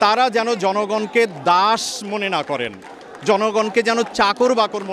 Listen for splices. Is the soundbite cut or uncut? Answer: uncut